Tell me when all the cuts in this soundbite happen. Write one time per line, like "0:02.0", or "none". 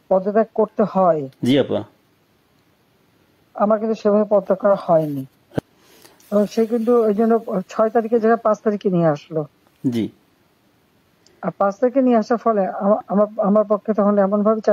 0:05.6